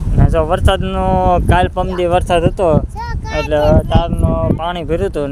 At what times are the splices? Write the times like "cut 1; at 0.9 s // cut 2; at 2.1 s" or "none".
none